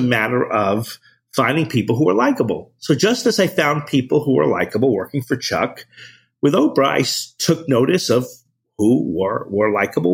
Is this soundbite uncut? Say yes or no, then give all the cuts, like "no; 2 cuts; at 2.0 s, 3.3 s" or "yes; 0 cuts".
yes; 0 cuts